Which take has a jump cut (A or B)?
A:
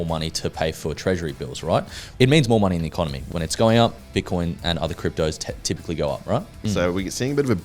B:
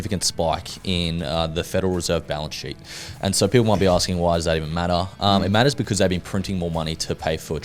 A